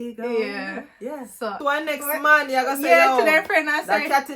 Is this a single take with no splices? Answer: no; 1 cut; at 1.6 s

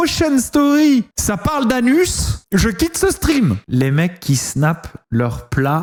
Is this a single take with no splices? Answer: yes; 0 cuts

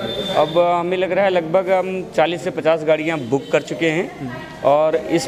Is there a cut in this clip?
no; 0 cuts

